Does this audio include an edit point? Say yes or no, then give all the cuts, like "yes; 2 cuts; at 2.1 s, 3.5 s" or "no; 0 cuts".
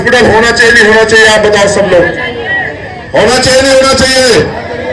no; 0 cuts